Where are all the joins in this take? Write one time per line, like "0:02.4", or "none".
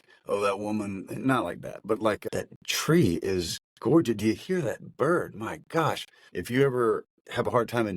0:02.2